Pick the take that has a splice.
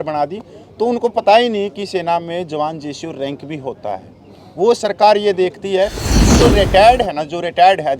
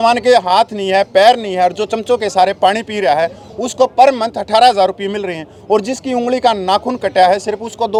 first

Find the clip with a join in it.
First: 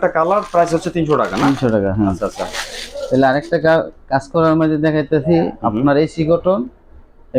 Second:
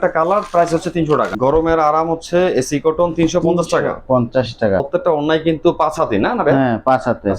second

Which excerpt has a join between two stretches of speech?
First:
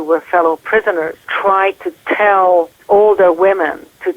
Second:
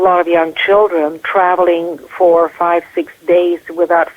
first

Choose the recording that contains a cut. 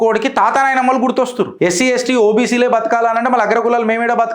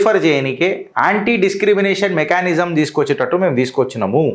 first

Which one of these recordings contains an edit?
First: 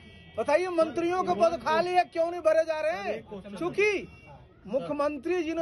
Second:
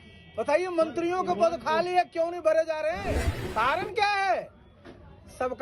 second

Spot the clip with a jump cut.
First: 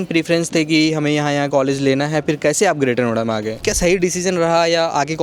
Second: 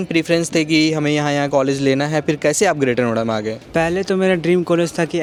first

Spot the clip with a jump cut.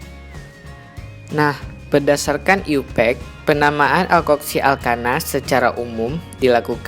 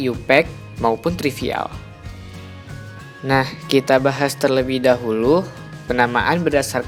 first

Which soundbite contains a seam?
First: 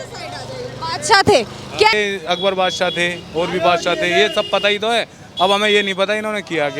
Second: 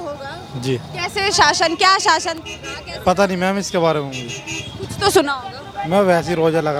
first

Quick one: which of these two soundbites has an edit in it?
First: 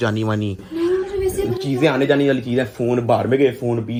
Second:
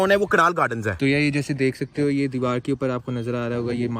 second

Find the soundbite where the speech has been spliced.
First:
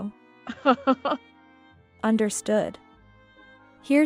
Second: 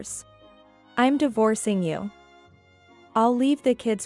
first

